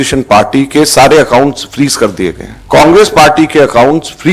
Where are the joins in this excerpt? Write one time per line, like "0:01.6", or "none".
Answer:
0:02.5